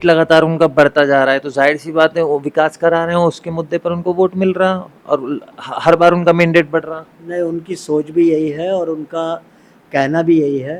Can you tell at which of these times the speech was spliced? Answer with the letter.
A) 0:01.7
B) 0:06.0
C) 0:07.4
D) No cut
D